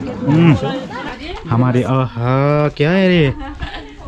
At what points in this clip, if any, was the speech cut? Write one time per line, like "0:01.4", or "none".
0:01.0